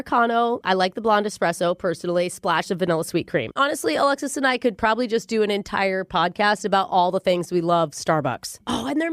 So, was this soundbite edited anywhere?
yes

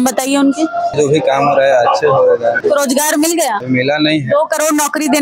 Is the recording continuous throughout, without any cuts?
no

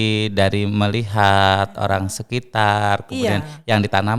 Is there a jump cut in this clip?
no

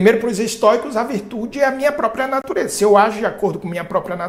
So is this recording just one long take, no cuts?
yes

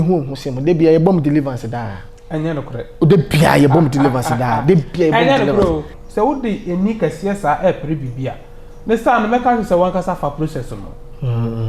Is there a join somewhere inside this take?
yes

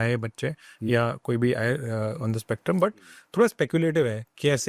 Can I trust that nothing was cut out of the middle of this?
yes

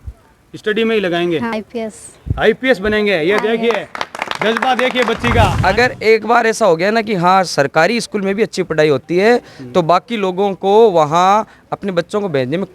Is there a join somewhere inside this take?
yes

